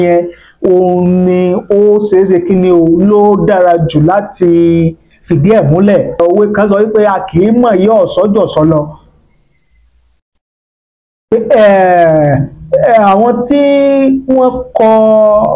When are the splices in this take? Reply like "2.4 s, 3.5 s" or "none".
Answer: 6.2 s